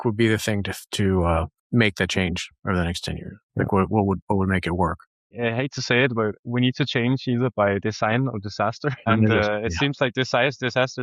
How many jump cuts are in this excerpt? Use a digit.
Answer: 2